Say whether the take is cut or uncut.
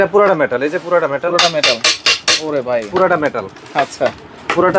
uncut